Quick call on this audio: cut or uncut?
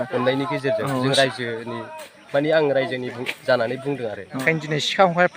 cut